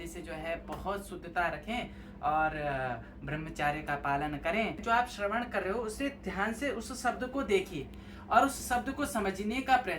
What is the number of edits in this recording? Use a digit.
1